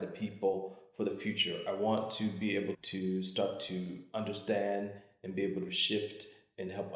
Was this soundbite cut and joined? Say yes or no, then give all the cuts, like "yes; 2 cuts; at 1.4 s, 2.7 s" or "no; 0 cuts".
yes; 1 cut; at 2.8 s